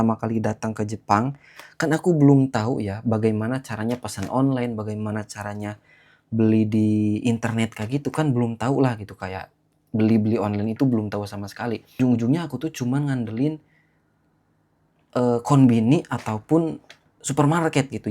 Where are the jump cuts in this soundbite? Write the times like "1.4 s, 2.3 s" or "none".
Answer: 12.0 s